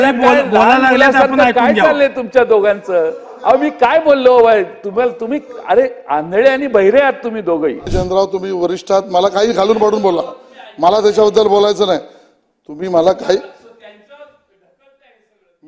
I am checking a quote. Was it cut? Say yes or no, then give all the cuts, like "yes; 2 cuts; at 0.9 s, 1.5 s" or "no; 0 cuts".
yes; 1 cut; at 7.9 s